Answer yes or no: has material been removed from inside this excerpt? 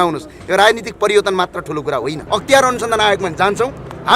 yes